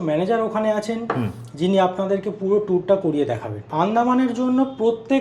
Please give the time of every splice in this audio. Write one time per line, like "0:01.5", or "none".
0:03.7

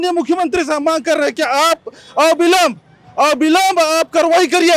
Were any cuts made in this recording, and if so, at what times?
none

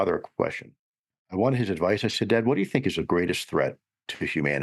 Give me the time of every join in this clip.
0:01.2

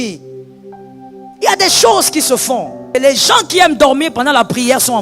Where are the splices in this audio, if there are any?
0:02.9

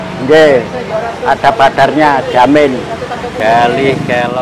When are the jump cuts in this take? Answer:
0:03.3

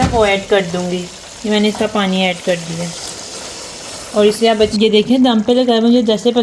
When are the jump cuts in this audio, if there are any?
0:04.7

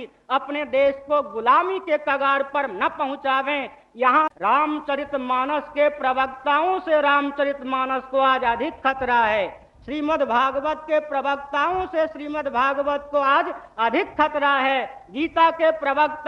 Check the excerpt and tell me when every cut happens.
0:04.3

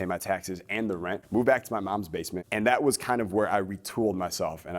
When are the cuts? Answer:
0:01.2
0:02.4

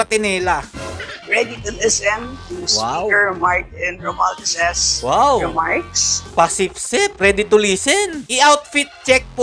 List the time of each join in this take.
0:01.2
0:08.2

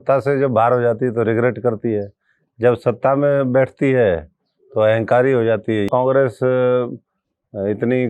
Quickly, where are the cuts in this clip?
0:05.9

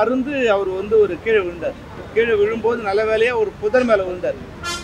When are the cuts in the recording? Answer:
none

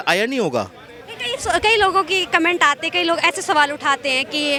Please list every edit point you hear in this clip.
none

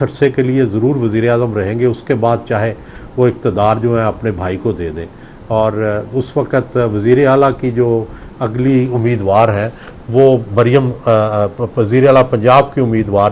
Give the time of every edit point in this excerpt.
none

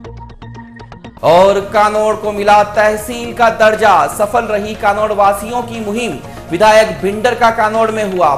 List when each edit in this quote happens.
0:01.1

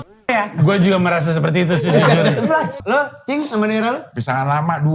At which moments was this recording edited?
0:02.8

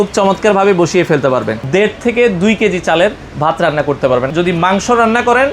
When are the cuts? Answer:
0:01.6
0:04.3

